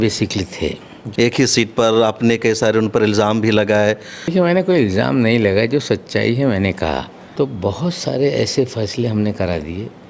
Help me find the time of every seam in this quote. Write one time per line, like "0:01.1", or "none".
0:01.0
0:04.1
0:07.2